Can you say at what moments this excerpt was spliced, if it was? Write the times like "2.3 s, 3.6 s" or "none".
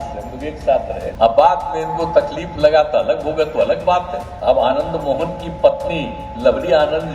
1.0 s, 4.2 s